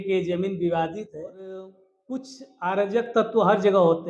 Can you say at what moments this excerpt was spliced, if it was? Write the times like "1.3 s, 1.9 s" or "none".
1.9 s